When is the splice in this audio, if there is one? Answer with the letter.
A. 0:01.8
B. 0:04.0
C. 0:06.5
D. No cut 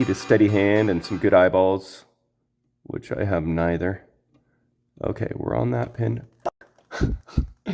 C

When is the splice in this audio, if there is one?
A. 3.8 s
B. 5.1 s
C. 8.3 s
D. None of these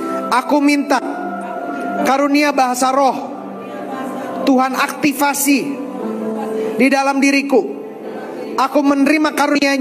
D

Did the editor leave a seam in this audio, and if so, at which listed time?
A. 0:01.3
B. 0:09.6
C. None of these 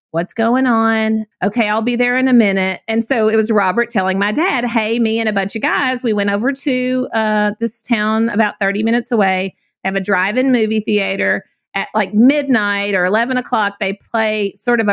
A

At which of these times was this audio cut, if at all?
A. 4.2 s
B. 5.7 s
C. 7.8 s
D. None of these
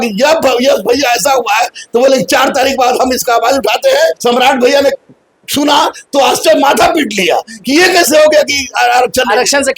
A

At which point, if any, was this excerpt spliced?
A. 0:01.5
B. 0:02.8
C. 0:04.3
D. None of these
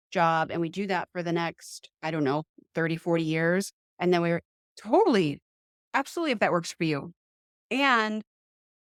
D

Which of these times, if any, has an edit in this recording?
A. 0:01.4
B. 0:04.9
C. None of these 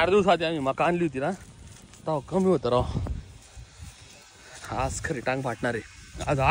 C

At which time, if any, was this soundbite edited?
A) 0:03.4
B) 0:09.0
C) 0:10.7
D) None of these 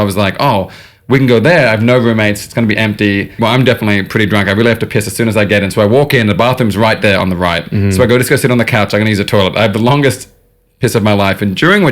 A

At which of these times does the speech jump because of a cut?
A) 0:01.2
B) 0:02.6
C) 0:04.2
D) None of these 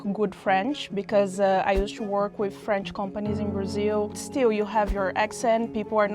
C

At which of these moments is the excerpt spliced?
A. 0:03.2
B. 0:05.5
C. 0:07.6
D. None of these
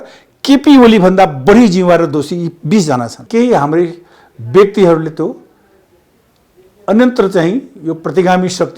A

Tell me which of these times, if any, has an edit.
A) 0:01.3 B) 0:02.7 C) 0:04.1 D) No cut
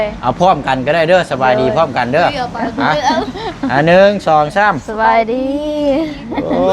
D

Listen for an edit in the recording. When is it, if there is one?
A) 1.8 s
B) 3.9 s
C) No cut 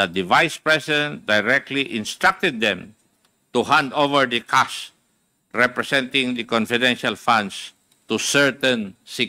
C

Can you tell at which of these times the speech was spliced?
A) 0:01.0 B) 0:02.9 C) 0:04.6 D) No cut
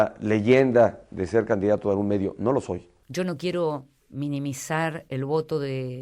B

